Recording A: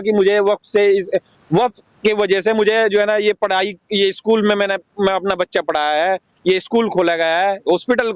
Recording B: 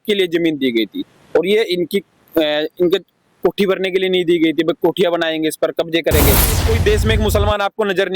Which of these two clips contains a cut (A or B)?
B